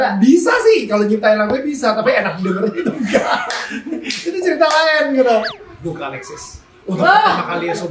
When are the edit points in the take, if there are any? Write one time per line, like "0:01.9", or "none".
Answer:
0:05.5